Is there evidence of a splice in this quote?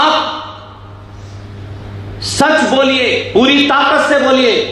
yes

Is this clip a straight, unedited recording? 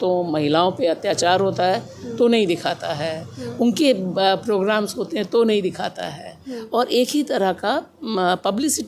yes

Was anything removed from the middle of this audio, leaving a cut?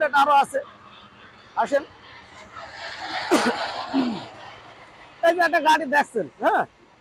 no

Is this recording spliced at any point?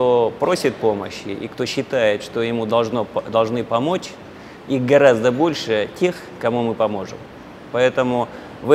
no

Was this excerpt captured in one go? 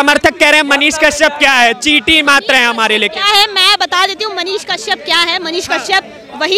yes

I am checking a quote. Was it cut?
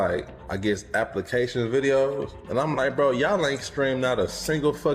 no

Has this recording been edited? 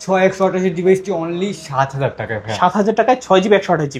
no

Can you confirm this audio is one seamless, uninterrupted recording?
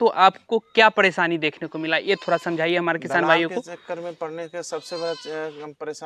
yes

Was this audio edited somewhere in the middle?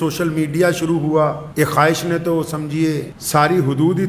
yes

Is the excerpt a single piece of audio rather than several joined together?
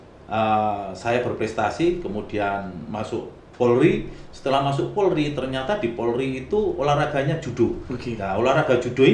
yes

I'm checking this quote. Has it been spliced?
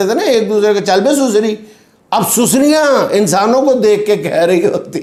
no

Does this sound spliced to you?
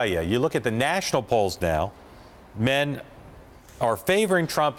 no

